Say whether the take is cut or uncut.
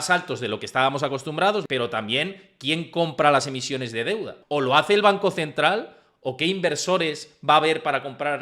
cut